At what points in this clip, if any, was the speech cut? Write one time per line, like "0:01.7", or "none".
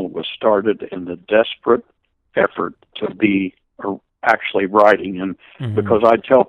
0:02.9